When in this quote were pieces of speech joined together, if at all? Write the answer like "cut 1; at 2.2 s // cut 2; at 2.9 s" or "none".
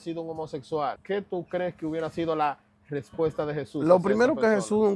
cut 1; at 1.0 s